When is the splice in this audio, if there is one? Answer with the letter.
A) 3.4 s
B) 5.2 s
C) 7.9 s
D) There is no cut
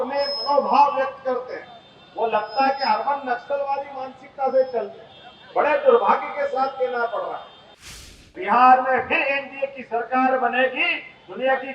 C